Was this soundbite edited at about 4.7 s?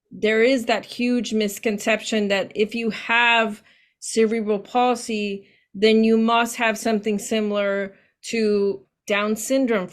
no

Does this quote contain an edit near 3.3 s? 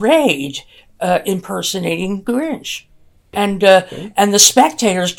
yes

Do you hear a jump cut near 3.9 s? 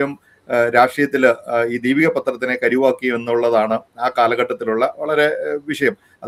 no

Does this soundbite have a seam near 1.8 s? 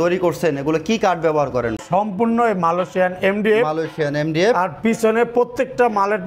yes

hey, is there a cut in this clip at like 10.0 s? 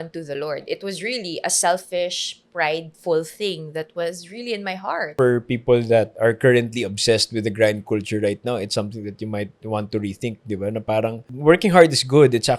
no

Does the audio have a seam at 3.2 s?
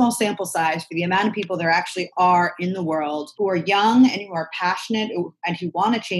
yes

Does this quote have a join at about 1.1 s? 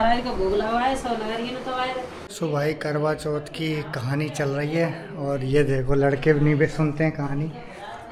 no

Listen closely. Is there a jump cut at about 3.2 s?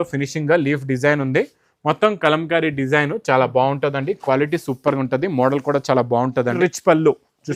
no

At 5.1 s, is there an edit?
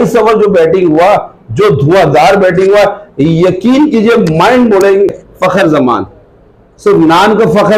yes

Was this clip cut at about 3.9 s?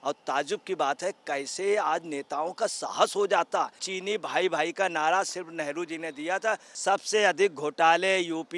yes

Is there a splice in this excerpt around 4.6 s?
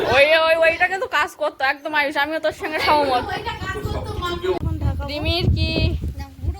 yes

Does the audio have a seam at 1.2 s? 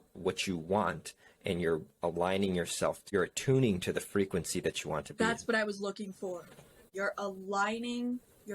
no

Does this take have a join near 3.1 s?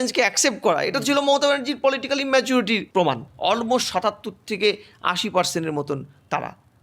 yes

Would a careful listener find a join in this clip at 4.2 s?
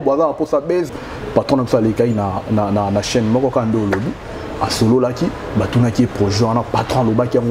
no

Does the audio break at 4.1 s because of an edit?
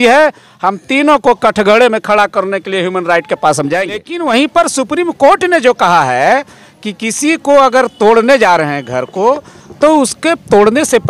yes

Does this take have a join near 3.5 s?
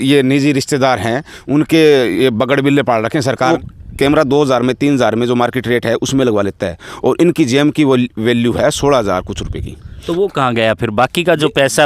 yes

